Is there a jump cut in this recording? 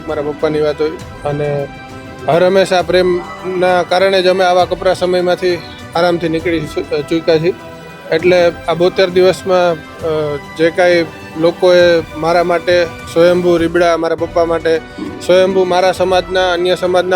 no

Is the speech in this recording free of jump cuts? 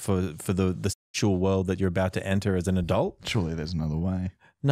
yes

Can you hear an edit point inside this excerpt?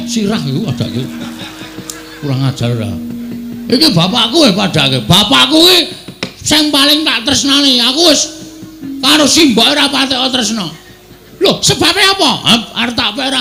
no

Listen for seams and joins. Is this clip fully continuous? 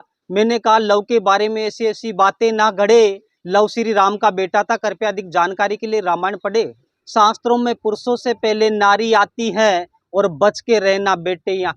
no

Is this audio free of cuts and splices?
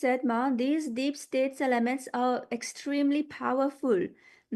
yes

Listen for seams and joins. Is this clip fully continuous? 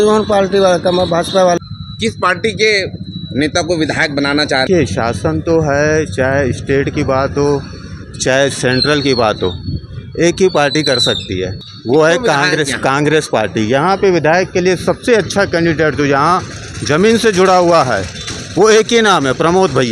no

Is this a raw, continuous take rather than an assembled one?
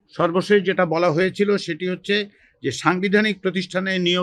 yes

